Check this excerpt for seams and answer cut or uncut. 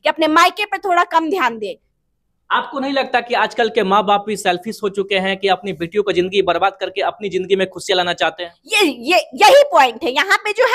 uncut